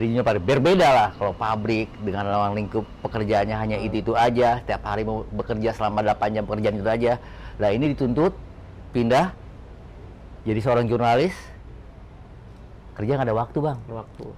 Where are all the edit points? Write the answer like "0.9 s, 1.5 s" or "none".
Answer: none